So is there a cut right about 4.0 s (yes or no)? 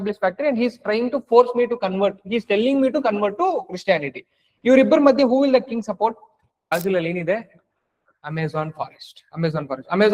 no